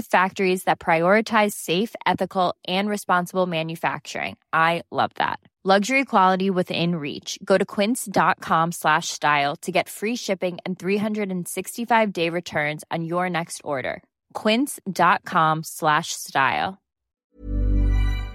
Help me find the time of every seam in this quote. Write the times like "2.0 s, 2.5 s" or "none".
17.2 s